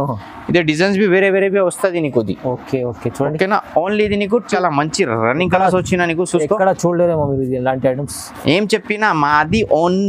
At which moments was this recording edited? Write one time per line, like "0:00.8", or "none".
0:04.5